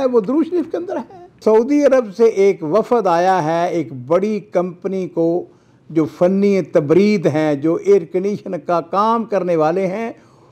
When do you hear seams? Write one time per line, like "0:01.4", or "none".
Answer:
0:01.4